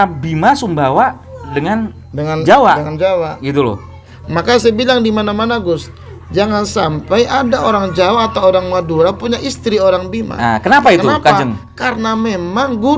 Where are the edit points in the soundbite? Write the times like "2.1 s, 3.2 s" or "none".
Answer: 4.0 s

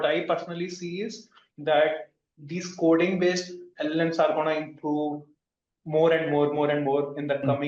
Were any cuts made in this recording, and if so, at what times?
none

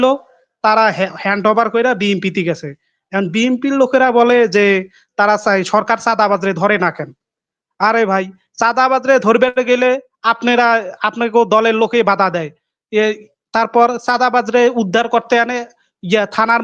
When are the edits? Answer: none

